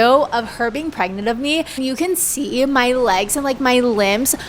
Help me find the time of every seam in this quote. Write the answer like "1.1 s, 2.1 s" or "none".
1.7 s